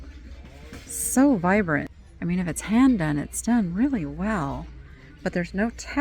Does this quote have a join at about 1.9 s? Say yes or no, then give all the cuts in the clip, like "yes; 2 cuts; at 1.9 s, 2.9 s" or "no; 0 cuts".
yes; 1 cut; at 1.9 s